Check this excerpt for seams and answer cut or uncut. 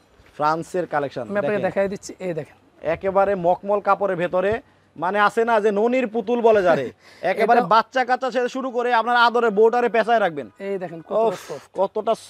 uncut